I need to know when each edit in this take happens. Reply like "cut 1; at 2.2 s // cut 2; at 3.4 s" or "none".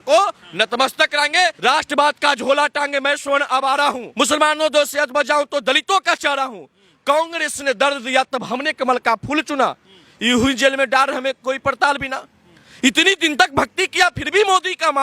cut 1; at 1.6 s // cut 2; at 4.0 s